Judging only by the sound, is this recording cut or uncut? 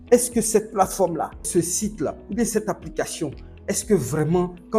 cut